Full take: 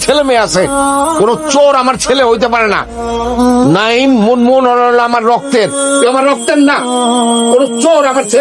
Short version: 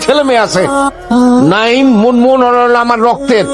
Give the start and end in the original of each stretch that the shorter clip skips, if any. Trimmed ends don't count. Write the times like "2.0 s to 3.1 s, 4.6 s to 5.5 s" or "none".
1.0 s to 3.2 s